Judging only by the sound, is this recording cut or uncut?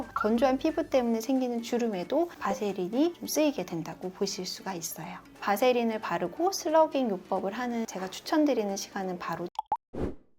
cut